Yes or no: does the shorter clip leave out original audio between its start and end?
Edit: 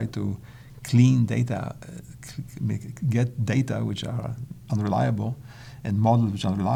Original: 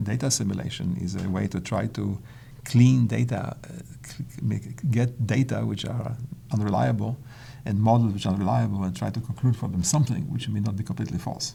no